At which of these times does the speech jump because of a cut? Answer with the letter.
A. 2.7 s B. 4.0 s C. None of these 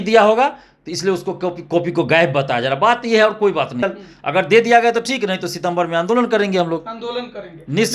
B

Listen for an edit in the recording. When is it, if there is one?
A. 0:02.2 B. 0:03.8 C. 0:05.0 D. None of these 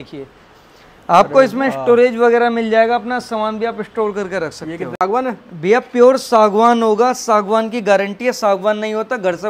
C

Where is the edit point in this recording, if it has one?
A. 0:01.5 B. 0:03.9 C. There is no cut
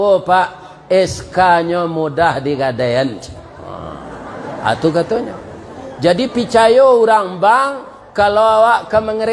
B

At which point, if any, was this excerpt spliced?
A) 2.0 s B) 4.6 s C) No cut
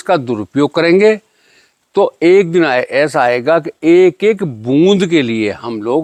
C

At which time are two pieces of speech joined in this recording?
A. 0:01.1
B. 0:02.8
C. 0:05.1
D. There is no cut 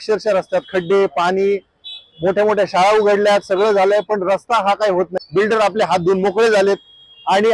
C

